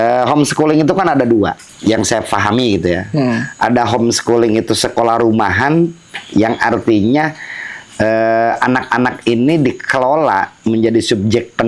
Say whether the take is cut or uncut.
uncut